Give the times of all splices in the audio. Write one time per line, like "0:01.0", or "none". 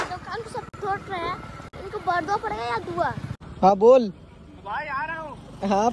0:03.4